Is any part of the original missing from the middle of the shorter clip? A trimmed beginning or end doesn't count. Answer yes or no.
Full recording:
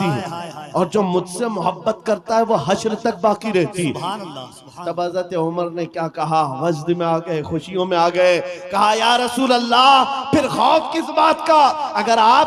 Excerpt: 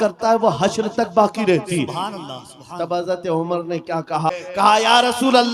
yes